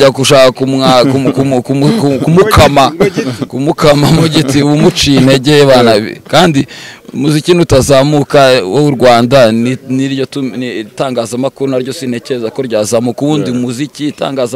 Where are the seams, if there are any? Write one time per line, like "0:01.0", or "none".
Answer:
none